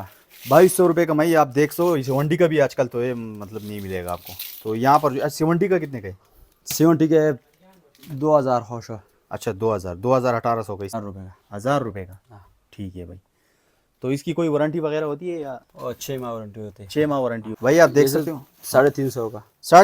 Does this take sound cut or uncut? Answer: cut